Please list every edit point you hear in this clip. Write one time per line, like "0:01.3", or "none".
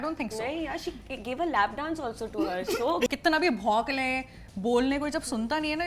0:03.1